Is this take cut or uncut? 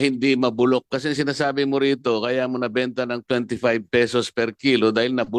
uncut